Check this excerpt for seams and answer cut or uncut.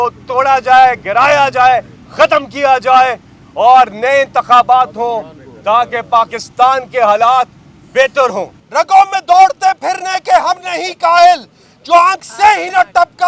cut